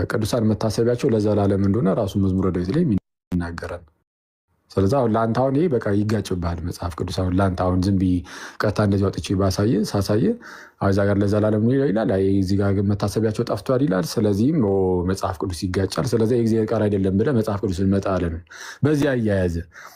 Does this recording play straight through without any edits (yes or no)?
yes